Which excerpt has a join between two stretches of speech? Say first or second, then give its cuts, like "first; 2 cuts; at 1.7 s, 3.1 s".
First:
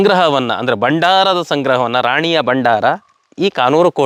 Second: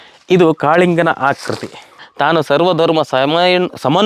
second; 1 cut; at 2.0 s